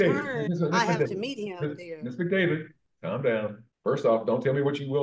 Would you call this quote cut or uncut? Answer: cut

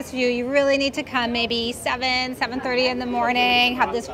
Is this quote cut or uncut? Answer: uncut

